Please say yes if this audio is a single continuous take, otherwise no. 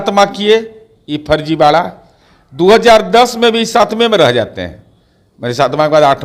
yes